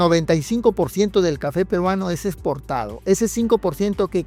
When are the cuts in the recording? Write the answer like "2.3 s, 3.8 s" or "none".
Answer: none